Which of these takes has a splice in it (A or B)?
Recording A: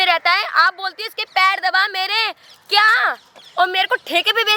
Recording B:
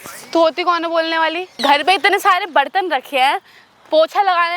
B